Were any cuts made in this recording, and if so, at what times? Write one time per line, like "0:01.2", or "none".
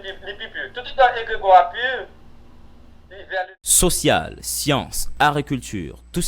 0:03.6